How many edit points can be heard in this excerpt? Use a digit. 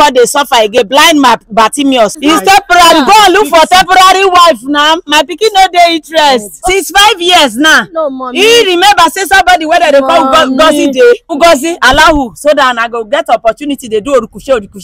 3